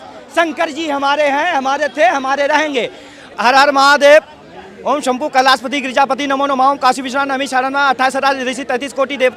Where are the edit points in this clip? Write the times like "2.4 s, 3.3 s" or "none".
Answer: 3.2 s